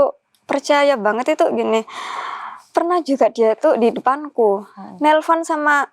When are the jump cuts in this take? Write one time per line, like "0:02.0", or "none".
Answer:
none

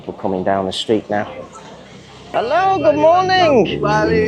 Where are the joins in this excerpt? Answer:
0:02.3

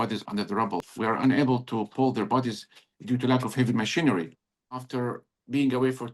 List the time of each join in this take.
0:00.8
0:04.8

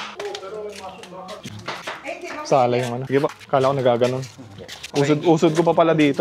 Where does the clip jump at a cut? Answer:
0:03.0

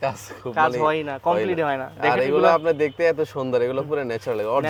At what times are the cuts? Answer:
none

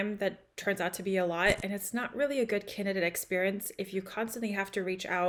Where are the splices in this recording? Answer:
none

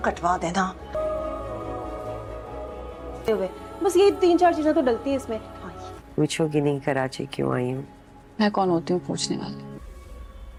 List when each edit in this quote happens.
none

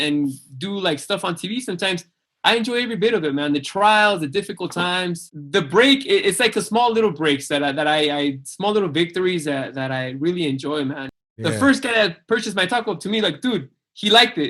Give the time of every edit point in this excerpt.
0:05.3
0:11.1

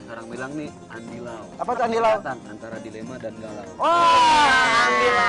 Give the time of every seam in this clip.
none

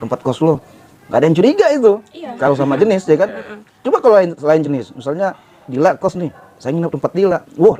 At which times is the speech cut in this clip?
none

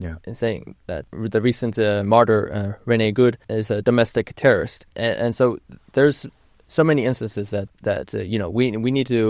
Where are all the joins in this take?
0:01.1
0:03.5
0:04.8
0:07.7

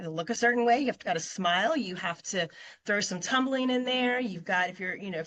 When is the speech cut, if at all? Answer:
none

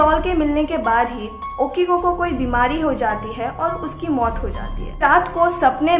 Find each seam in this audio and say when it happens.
0:05.0

